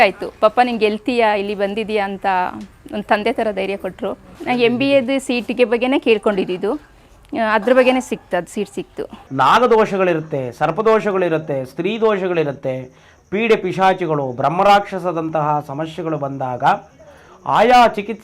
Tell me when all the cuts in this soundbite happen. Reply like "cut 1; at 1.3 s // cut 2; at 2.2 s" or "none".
cut 1; at 4.3 s // cut 2; at 9.2 s